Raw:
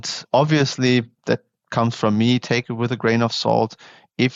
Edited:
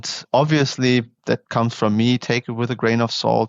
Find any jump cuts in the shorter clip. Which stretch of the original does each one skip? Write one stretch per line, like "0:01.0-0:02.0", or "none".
0:01.5-0:01.7